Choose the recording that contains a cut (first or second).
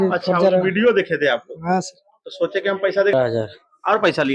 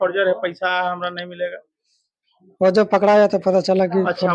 first